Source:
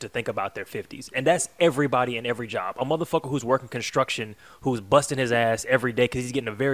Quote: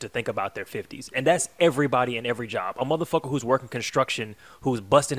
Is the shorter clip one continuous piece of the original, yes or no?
yes